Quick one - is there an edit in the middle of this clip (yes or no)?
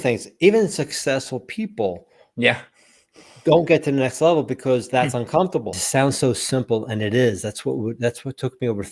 yes